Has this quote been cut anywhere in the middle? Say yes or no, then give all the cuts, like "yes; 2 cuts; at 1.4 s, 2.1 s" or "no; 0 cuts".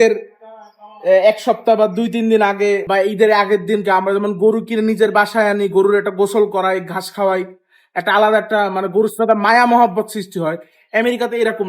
yes; 1 cut; at 2.8 s